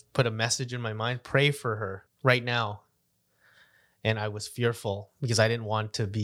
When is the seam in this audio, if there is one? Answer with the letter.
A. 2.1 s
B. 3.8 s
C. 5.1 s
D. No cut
A